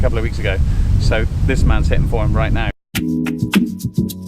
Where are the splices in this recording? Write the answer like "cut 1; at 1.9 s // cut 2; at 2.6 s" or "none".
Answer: cut 1; at 2.8 s